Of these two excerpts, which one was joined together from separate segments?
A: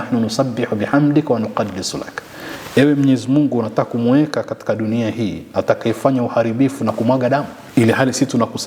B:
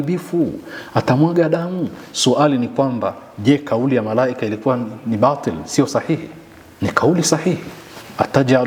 A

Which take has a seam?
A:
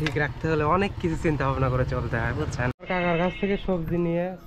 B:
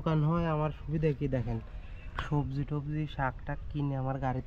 A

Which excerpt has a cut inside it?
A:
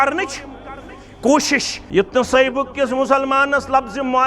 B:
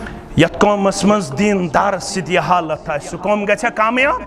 A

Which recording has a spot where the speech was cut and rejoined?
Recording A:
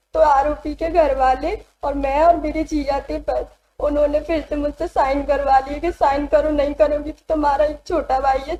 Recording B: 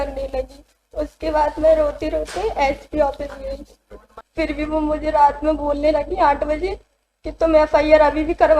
B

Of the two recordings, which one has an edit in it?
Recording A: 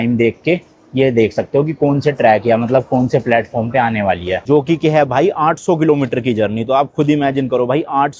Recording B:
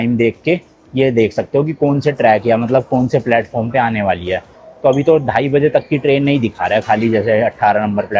A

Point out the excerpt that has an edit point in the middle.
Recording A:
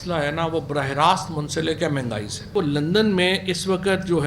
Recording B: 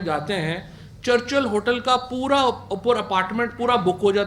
A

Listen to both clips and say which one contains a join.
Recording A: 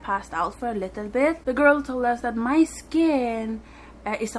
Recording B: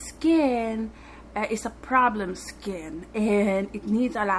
A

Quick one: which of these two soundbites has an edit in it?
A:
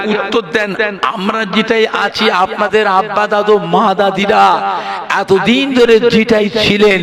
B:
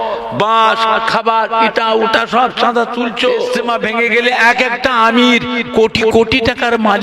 B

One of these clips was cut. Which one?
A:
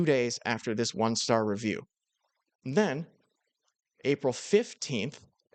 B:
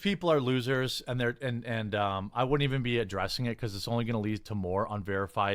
B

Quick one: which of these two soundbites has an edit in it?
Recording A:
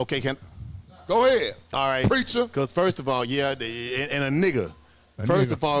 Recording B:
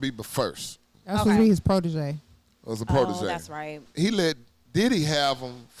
B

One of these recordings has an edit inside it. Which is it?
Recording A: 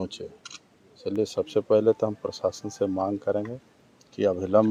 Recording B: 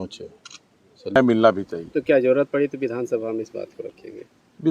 B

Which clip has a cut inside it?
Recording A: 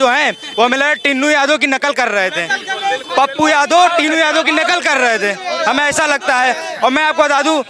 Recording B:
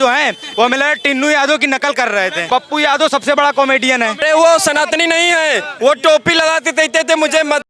B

